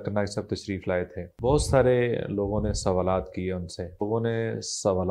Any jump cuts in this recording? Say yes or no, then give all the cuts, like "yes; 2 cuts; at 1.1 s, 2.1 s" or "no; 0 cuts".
yes; 2 cuts; at 1.2 s, 4.0 s